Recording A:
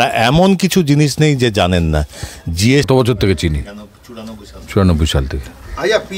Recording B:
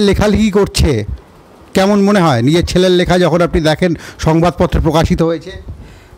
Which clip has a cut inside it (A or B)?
A